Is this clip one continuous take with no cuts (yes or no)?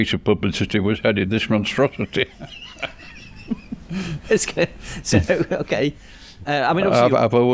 yes